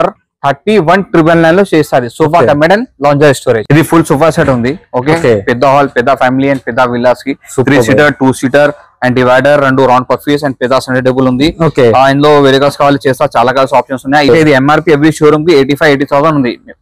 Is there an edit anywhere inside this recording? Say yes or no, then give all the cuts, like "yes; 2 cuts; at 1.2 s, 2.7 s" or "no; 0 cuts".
yes; 2 cuts; at 3.6 s, 14.3 s